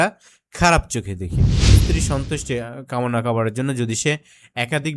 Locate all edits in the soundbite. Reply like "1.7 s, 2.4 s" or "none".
1.7 s